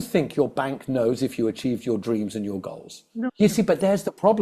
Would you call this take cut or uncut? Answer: cut